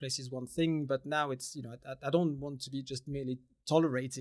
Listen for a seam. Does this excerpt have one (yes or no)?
no